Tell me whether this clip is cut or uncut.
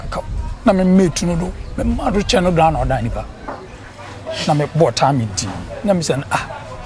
uncut